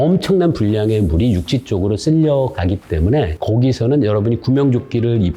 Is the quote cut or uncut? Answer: uncut